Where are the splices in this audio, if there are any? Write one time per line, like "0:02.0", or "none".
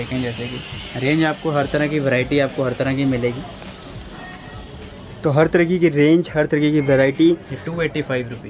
none